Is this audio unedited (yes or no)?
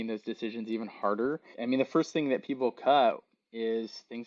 no